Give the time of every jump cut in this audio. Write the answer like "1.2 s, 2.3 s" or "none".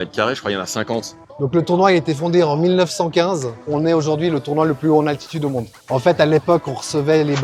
1.2 s, 3.7 s, 5.8 s